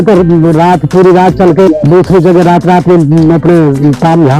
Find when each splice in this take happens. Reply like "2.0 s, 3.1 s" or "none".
1.7 s